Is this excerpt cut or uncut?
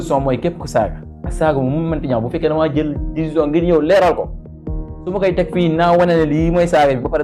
uncut